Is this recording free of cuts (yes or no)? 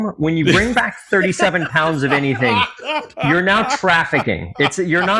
yes